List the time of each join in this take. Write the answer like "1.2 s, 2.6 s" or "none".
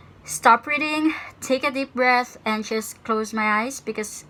none